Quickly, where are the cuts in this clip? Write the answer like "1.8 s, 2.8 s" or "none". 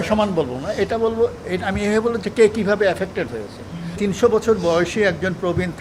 4.0 s